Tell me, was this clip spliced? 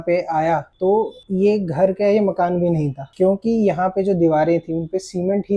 yes; 1 cut; at 1.0 s

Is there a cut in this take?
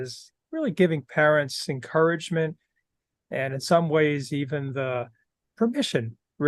no; 0 cuts

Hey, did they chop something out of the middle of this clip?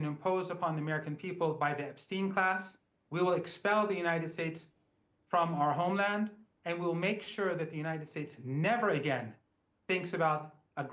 no; 0 cuts

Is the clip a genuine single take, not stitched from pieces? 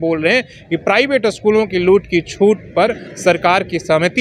yes; 0 cuts

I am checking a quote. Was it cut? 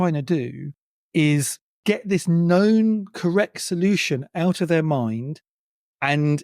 yes; 1 cut; at 1.6 s

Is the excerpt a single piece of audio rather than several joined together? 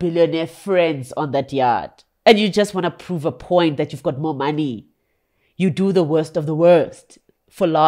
yes; 0 cuts

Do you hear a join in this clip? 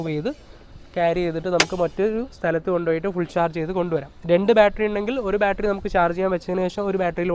no; 0 cuts

